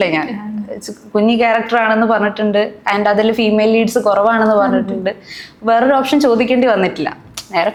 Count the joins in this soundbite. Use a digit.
0